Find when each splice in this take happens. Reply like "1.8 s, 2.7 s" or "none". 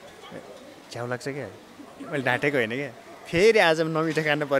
none